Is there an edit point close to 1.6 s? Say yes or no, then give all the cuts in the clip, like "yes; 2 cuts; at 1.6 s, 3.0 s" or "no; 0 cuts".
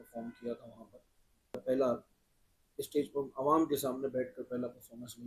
yes; 1 cut; at 1.6 s